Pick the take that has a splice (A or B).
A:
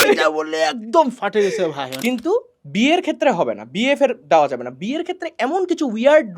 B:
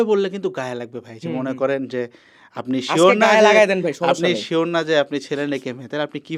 A